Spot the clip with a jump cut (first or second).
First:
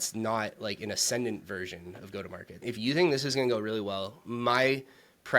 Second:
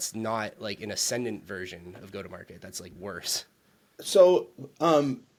first